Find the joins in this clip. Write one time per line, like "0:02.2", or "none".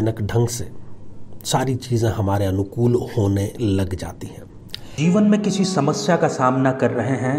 none